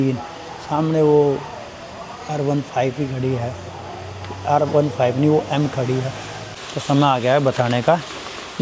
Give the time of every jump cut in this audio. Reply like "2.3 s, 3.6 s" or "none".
6.5 s